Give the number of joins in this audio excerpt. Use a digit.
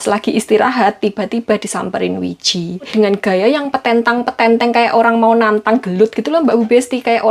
1